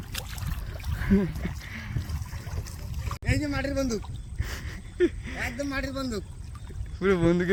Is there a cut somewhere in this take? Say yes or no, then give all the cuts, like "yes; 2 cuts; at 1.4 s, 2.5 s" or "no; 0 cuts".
no; 0 cuts